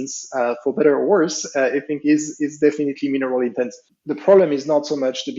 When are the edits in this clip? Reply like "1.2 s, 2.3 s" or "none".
3.9 s